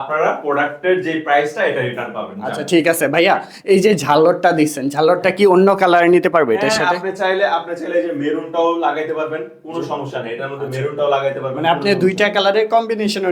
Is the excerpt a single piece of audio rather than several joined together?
yes; 0 cuts

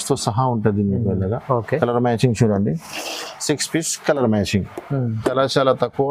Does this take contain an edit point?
no; 0 cuts

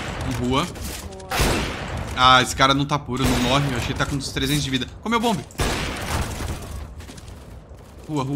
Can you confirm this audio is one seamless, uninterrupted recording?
yes; 0 cuts

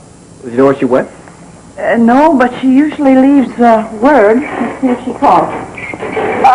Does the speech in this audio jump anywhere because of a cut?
yes; 1 cut; at 5.0 s

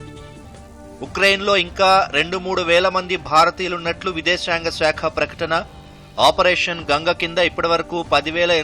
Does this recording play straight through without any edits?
no; 1 cut; at 0.9 s

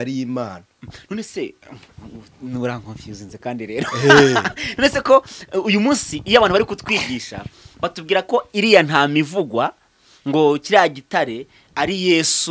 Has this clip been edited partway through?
no; 0 cuts

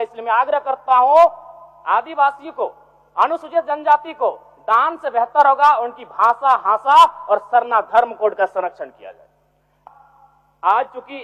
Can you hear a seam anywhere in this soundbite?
yes; 1 cut; at 9.7 s

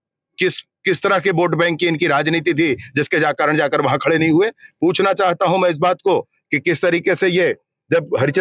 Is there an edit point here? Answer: no; 0 cuts

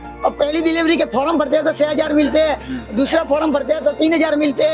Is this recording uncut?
yes; 0 cuts

